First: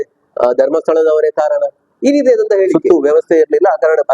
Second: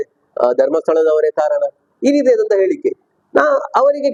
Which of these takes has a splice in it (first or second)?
first